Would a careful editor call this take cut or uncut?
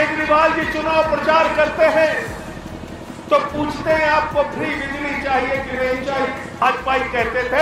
cut